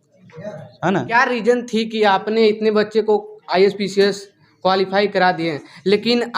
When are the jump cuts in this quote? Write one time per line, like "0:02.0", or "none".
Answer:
0:01.1

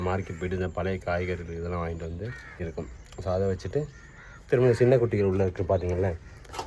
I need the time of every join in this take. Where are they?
0:02.7

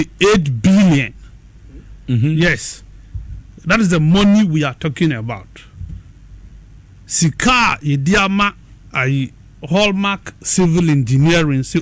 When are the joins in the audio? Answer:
0:05.1

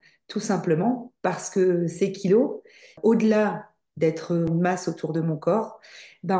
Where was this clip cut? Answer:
0:02.9
0:04.5

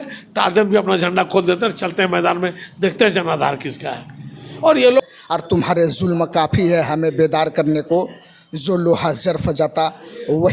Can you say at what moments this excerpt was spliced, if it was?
0:05.0

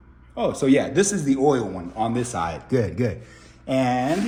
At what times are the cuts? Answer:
none

